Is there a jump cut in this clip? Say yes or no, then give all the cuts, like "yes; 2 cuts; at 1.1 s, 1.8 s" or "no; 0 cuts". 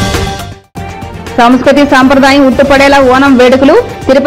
no; 0 cuts